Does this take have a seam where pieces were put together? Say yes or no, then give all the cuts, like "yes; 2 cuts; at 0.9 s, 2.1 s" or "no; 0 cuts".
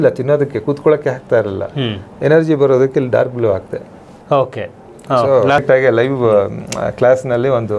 yes; 1 cut; at 5.6 s